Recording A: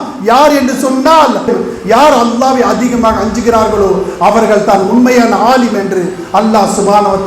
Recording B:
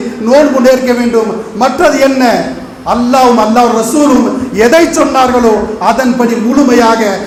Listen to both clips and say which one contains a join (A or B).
A